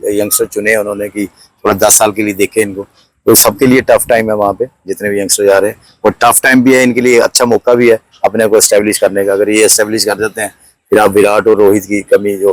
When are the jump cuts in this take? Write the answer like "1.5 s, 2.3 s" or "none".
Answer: none